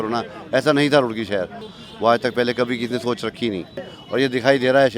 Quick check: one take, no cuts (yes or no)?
no